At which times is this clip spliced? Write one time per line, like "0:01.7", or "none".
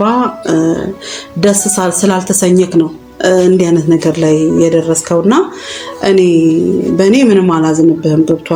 none